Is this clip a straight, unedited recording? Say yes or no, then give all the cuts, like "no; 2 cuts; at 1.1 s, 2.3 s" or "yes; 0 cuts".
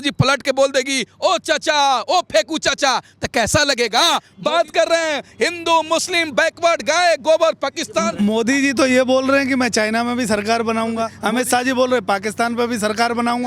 no; 3 cuts; at 4.3 s, 8.1 s, 11.2 s